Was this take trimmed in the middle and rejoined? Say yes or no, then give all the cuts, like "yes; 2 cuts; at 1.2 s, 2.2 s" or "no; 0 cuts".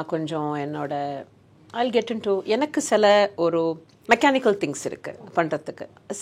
yes; 1 cut; at 3.9 s